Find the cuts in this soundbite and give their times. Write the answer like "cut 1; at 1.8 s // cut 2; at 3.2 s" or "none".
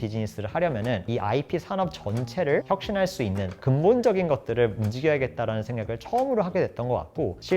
cut 1; at 2.6 s